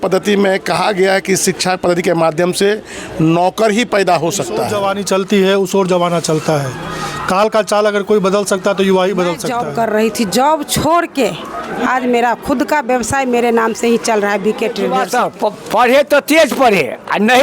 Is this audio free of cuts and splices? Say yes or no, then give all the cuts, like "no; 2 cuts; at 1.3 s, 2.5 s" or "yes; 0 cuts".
no; 3 cuts; at 4.7 s, 9.5 s, 14.9 s